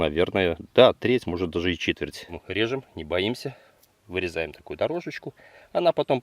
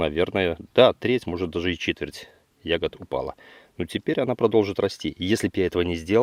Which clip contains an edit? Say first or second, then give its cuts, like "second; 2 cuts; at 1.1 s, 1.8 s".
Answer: first; 1 cut; at 2.4 s